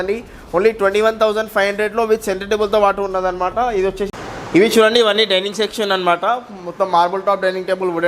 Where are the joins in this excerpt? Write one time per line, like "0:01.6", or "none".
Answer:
0:04.2

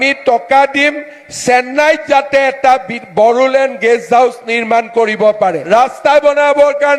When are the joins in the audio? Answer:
0:05.6

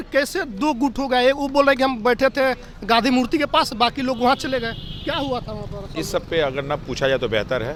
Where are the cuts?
none

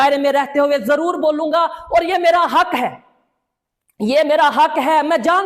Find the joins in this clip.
none

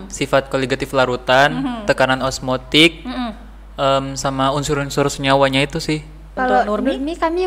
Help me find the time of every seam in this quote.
0:06.2

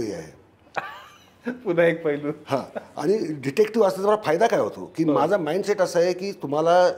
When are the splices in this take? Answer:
none

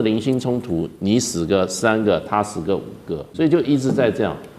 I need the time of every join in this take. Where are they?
0:03.2

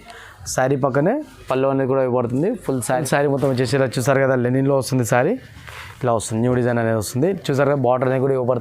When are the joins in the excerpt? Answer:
0:02.8

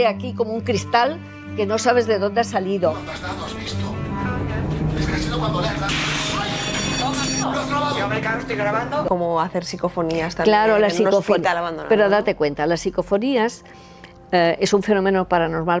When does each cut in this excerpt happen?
0:09.1

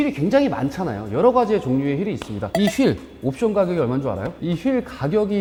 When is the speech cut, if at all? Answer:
none

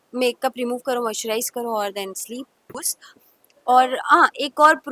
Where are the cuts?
0:02.7

